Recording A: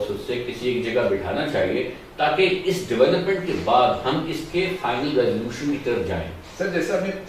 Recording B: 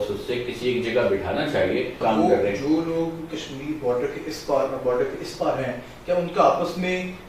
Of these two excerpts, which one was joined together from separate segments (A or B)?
B